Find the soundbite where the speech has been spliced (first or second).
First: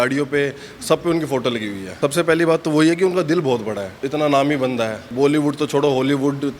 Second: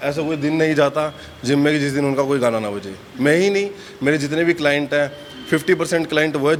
first